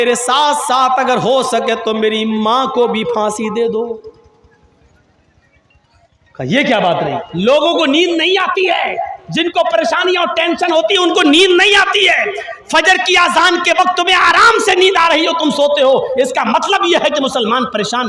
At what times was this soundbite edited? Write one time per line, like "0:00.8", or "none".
0:07.3